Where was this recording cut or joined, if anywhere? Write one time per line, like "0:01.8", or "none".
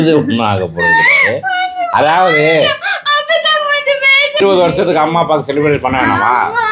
0:04.4